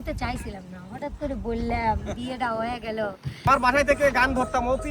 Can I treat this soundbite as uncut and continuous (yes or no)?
no